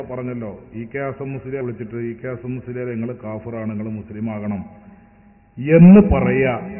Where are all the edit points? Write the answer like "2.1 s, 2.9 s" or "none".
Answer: 1.6 s